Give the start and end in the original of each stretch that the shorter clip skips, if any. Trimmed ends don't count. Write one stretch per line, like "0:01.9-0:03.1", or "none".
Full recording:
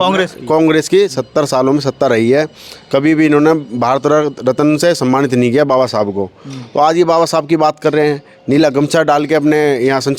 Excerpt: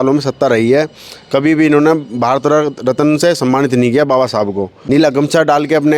0:06.3-0:08.3